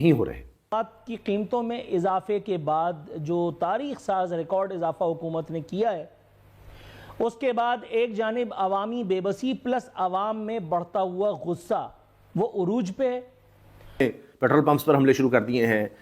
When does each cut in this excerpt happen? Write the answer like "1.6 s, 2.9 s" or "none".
0.7 s, 14.0 s